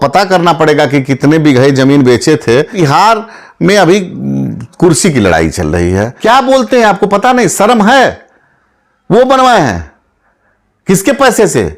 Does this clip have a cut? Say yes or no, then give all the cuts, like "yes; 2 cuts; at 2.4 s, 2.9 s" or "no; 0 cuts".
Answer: yes; 2 cuts; at 2.7 s, 6.1 s